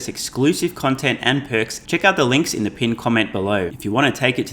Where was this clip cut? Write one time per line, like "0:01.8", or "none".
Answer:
0:01.8
0:03.7